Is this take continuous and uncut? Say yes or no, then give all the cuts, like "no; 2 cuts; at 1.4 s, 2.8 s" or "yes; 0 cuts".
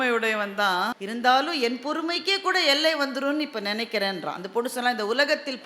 no; 1 cut; at 1.0 s